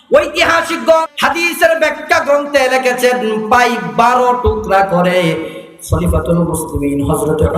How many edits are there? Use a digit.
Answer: 1